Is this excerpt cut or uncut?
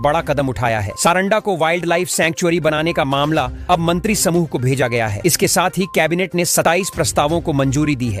uncut